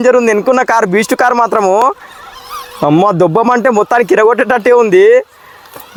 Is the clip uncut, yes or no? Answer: yes